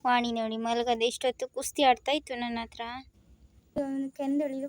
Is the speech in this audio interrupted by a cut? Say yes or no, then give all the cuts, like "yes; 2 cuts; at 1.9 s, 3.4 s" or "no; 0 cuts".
yes; 1 cut; at 3.8 s